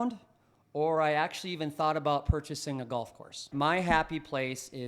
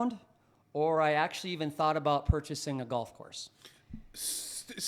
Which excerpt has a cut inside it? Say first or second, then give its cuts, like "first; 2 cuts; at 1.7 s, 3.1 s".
first; 1 cut; at 3.5 s